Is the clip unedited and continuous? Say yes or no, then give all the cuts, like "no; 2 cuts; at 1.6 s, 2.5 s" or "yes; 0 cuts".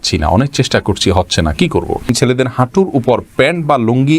no; 1 cut; at 2.1 s